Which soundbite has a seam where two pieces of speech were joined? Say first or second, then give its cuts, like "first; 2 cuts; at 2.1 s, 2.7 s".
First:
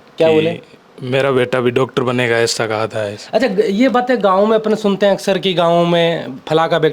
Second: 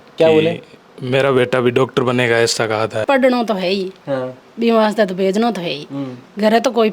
second; 1 cut; at 3.0 s